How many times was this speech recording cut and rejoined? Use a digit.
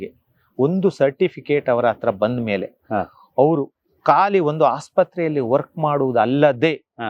0